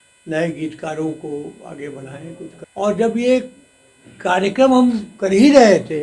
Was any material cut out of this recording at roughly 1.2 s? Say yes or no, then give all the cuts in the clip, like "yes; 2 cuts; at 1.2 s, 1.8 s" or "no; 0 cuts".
no; 1 cut; at 2.6 s